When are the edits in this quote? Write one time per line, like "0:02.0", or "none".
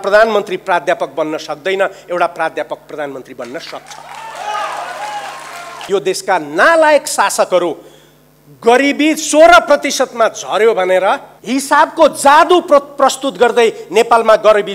0:05.9
0:11.3